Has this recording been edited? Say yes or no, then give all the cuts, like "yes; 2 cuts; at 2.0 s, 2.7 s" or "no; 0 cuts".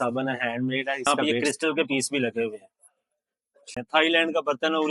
yes; 2 cuts; at 1.1 s, 3.7 s